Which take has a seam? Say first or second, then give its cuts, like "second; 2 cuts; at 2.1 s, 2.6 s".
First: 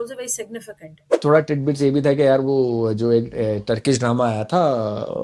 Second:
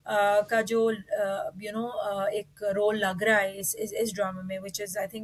first; 1 cut; at 1.1 s